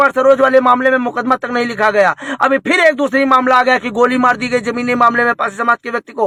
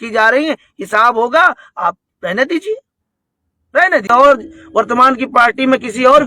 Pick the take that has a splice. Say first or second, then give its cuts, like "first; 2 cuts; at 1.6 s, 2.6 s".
second; 1 cut; at 4.0 s